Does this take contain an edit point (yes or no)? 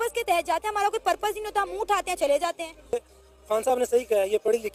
no